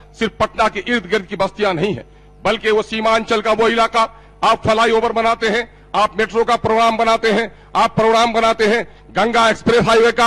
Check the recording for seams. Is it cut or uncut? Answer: uncut